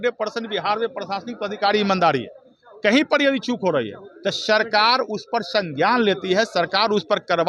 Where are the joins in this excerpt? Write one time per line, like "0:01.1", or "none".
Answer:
none